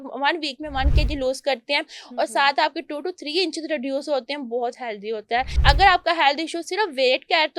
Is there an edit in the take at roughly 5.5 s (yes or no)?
yes